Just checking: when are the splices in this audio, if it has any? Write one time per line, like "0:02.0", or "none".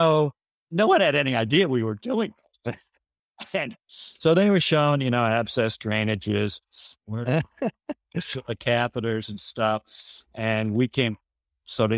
0:03.8